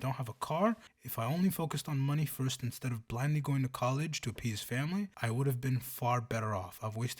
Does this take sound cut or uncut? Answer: cut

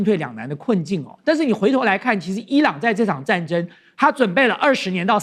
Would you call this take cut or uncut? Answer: uncut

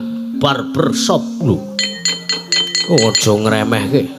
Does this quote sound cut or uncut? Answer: uncut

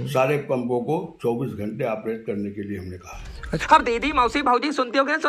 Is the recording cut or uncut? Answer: uncut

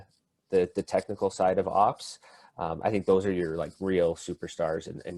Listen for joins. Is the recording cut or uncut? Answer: uncut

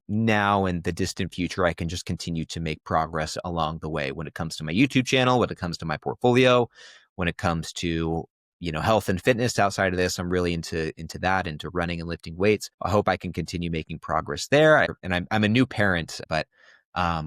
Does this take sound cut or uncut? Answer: cut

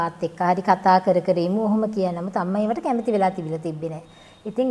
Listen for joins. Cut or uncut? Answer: uncut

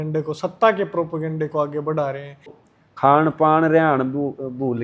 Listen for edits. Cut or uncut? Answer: cut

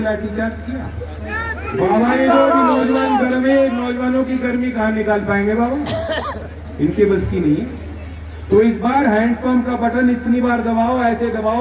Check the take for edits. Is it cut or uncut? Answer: cut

